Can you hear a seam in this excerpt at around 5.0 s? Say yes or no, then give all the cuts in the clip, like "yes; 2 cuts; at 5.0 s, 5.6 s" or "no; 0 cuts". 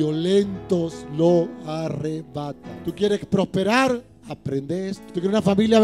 yes; 2 cuts; at 2.7 s, 5.0 s